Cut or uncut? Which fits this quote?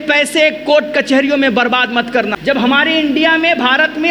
cut